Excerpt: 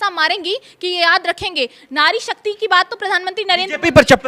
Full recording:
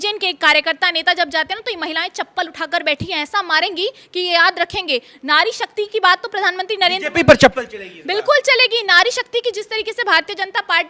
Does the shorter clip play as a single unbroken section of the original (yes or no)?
yes